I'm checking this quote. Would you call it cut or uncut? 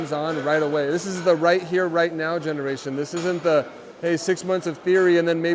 uncut